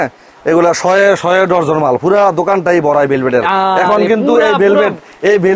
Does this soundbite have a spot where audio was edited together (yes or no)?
no